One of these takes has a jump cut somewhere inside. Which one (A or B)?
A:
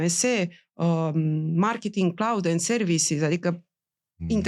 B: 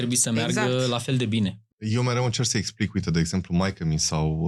B